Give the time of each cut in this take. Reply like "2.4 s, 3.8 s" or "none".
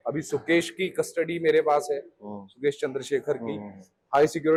none